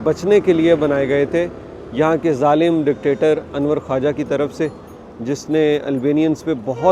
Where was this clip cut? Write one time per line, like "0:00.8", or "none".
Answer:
none